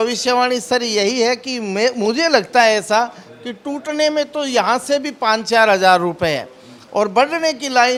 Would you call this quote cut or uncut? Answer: uncut